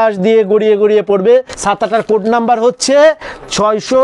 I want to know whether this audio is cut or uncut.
cut